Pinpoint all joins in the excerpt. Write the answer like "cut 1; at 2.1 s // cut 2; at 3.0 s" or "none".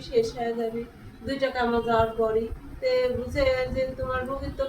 cut 1; at 2.6 s